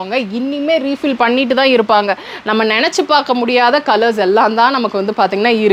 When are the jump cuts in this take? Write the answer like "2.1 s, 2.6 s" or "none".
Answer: none